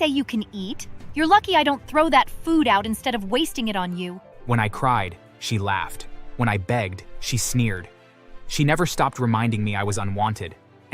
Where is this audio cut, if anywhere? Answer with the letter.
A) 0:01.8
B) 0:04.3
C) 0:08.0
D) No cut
B